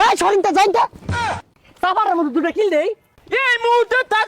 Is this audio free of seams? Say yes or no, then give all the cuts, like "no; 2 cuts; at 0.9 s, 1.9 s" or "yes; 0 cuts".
no; 2 cuts; at 1.3 s, 3.2 s